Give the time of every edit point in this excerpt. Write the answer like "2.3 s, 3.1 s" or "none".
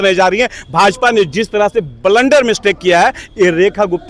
none